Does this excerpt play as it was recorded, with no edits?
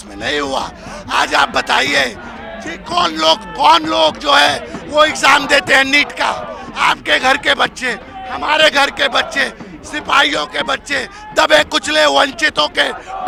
yes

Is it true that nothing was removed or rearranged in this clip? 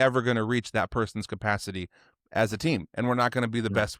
yes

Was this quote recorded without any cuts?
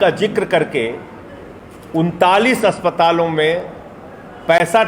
yes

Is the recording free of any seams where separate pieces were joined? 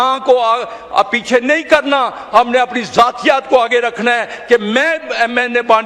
yes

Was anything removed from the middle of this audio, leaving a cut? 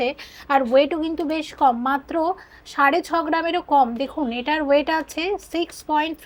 no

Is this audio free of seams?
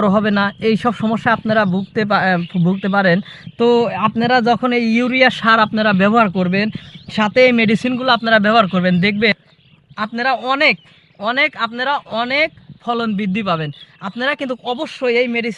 no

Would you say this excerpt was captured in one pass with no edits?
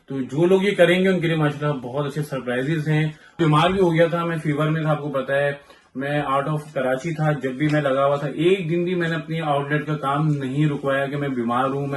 no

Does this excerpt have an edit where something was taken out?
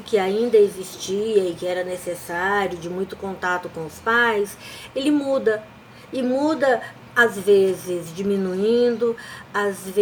no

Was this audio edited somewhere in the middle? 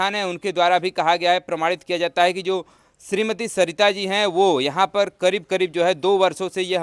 no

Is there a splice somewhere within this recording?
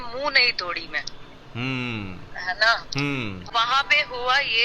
yes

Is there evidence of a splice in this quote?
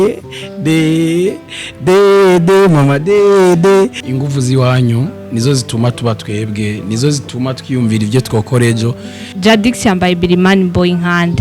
yes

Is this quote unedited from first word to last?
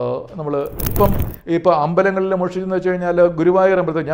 no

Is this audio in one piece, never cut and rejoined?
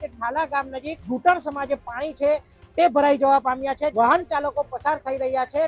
no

